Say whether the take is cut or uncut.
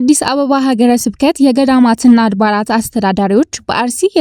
uncut